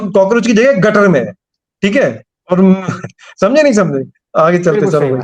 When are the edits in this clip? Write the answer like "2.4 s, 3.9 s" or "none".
none